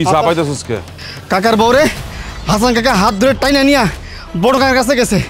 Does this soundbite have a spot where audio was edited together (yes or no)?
yes